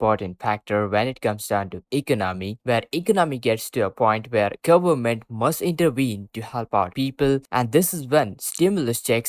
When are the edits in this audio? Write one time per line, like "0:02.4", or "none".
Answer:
none